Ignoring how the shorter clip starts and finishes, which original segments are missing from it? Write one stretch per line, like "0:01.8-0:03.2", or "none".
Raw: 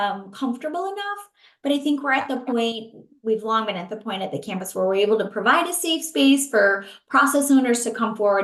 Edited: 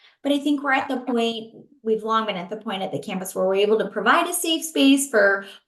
none

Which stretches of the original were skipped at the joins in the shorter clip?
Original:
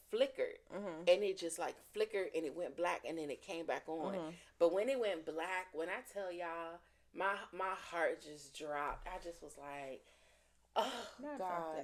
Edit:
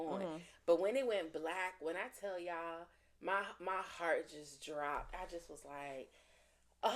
none

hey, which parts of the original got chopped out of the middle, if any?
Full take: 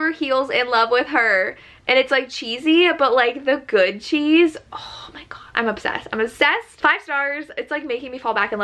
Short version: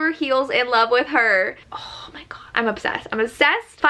0:01.7-0:04.7

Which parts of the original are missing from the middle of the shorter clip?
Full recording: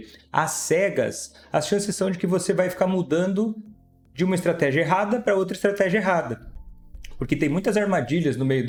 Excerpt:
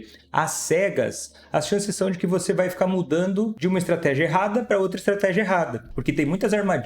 0:03.5-0:04.1
0:06.4-0:07.1

